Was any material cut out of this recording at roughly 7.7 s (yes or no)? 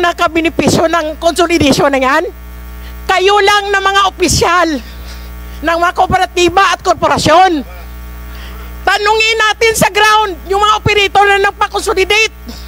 no